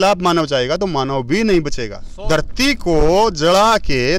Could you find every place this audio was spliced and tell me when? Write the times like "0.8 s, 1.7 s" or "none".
1.9 s